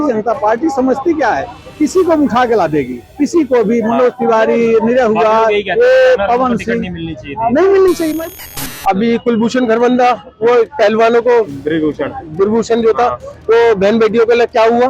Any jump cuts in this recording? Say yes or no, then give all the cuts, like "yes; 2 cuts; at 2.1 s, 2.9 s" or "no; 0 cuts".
yes; 1 cut; at 8.2 s